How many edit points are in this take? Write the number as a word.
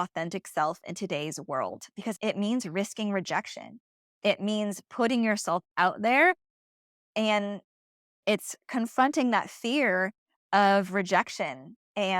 one